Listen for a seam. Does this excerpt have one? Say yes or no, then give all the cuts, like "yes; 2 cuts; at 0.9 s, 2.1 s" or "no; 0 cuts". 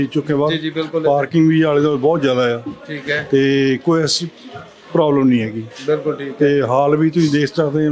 no; 0 cuts